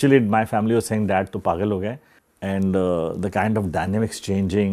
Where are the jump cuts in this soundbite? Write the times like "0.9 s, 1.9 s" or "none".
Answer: 2.1 s